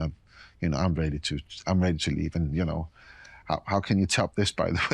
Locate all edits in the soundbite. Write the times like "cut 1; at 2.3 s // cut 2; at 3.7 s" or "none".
none